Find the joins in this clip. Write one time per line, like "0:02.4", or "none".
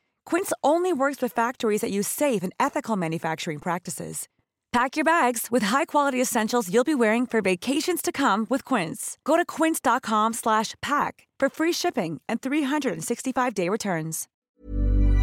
0:14.2